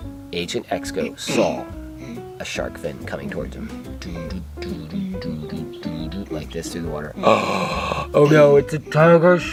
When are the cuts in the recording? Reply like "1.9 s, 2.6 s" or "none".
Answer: none